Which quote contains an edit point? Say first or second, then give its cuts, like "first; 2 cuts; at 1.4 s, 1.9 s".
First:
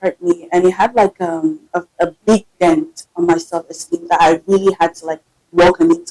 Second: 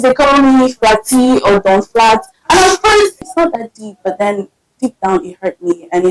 second; 1 cut; at 3.2 s